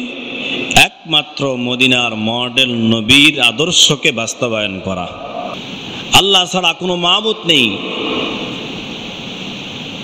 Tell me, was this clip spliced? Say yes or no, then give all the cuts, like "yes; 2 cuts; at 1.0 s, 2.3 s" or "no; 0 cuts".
yes; 1 cut; at 5.5 s